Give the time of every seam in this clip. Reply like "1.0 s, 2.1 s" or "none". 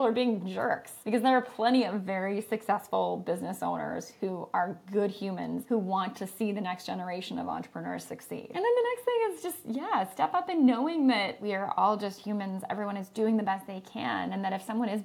0.9 s, 5.6 s, 8.5 s, 11.4 s